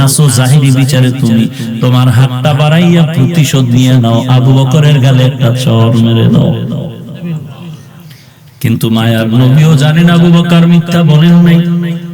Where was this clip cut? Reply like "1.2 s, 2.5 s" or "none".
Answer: none